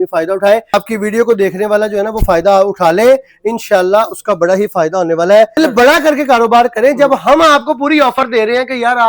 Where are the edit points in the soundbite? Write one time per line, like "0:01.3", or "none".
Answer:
0:00.7
0:05.6